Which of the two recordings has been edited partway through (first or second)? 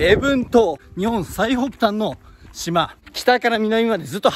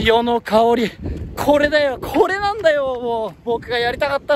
first